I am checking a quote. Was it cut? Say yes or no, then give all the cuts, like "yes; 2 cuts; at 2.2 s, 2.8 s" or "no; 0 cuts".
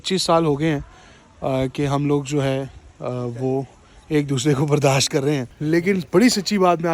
yes; 1 cut; at 5.5 s